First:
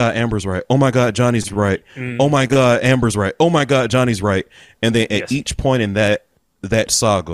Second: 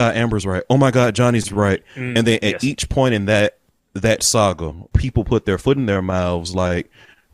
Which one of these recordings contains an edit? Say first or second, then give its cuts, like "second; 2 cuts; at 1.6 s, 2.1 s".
second; 2 cuts; at 2.0 s, 4.9 s